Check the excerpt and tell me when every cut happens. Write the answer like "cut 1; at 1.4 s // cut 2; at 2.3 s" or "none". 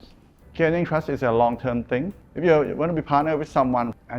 cut 1; at 2.1 s